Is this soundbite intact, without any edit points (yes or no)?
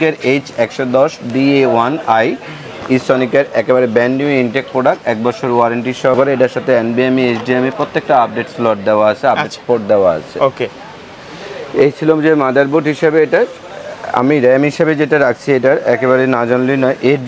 yes